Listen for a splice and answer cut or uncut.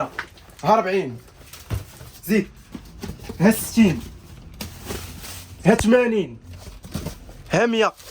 uncut